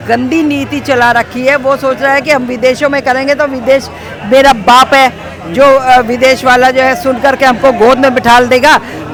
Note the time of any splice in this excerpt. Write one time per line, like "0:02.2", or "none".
none